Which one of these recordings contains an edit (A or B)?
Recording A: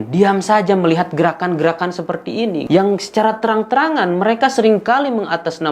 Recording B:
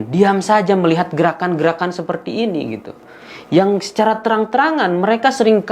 A